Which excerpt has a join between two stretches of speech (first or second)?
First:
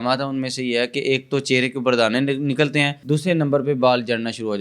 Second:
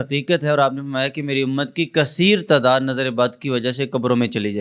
first